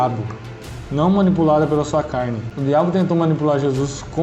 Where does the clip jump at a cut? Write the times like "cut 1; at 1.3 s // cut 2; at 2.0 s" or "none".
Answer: cut 1; at 2.5 s